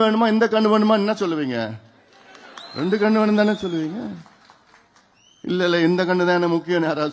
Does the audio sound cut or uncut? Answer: uncut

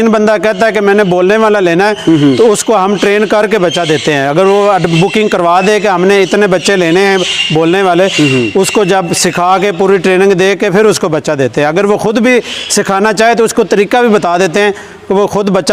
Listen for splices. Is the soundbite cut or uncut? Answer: uncut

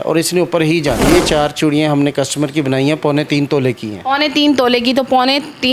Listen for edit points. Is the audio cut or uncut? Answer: cut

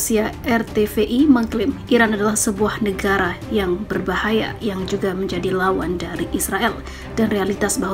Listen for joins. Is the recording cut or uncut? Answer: uncut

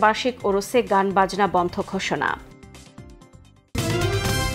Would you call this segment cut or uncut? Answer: cut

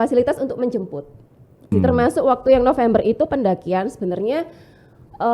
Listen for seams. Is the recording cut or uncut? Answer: cut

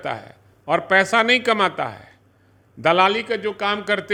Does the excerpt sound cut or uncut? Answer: uncut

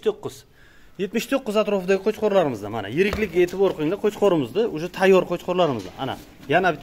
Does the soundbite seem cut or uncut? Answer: uncut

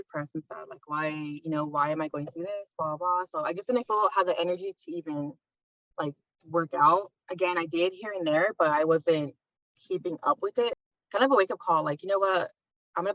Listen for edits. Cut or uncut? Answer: cut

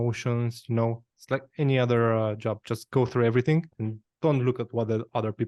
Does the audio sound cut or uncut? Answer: cut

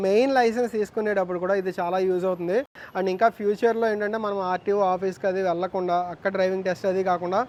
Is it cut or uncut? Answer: uncut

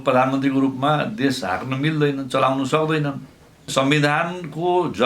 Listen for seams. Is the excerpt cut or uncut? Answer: cut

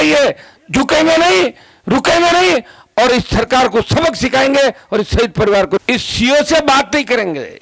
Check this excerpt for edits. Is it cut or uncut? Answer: cut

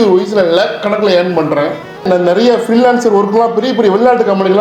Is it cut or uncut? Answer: cut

